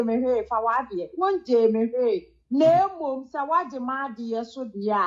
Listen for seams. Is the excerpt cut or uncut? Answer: uncut